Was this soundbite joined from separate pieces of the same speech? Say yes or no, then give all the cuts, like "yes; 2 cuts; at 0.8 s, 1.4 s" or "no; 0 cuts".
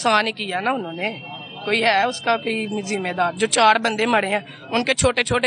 no; 0 cuts